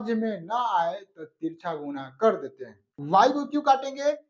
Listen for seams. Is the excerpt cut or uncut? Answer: cut